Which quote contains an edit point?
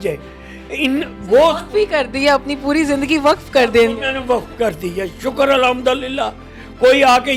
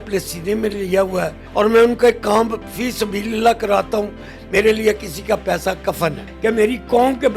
second; 2 cuts; at 1.4 s, 6.3 s

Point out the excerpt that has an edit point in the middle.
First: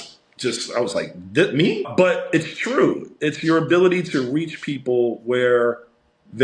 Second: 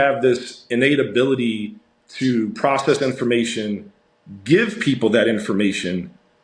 first; 1 cut; at 1.9 s

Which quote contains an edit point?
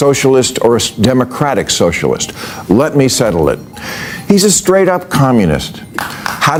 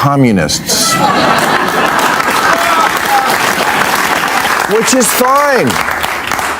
second; 1 cut; at 4.5 s

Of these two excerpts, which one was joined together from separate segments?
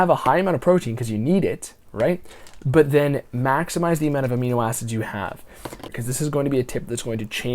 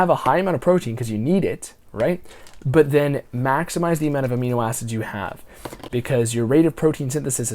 first; 1 cut; at 5.8 s

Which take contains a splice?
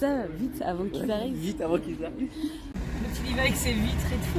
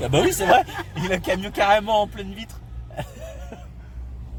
first; 1 cut; at 2.8 s

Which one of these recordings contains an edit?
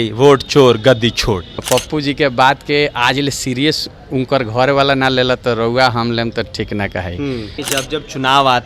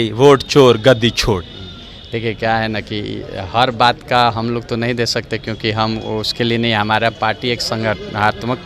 first; 2 cuts; at 1.6 s, 7.6 s

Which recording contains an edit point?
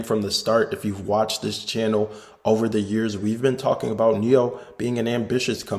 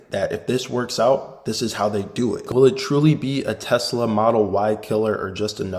second; 1 cut; at 2.4 s

